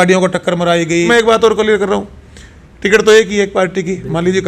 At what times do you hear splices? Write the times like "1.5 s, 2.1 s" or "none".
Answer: 1.1 s